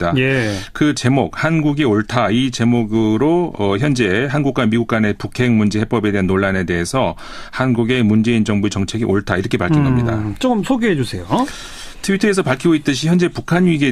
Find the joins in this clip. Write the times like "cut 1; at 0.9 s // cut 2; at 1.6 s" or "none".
cut 1; at 9.9 s